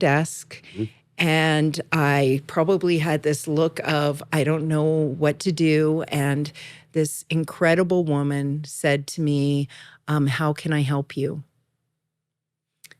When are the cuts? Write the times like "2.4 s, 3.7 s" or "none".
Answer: none